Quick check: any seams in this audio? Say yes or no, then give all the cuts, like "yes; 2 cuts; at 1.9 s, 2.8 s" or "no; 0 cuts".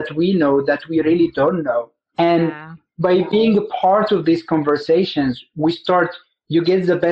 no; 0 cuts